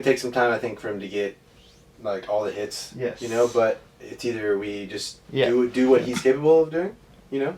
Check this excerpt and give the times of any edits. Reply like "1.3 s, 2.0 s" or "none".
none